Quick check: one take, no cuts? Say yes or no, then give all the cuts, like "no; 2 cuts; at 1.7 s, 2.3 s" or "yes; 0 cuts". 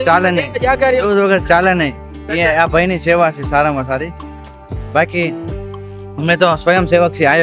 yes; 0 cuts